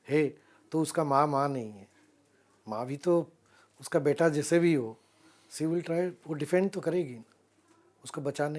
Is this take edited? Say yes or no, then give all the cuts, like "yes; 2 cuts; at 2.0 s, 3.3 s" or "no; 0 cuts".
no; 0 cuts